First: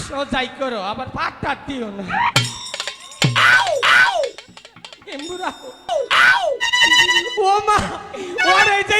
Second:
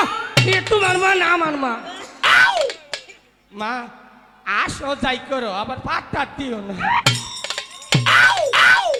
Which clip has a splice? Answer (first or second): first